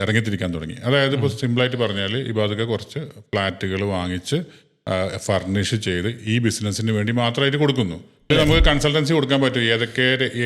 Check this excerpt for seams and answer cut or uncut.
cut